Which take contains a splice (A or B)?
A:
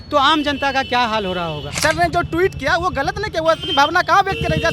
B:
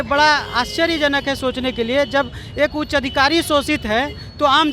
A